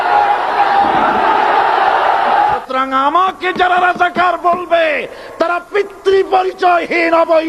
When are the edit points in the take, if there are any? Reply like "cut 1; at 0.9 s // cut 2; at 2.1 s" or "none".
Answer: cut 1; at 2.4 s